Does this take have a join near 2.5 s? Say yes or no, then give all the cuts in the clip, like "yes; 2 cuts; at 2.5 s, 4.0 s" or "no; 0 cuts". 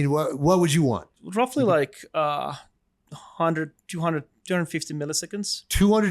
no; 1 cut; at 1.1 s